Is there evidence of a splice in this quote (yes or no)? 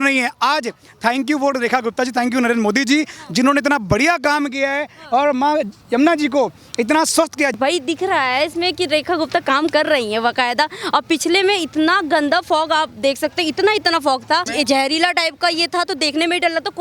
yes